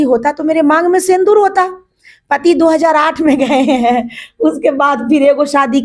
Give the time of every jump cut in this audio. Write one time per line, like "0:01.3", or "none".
none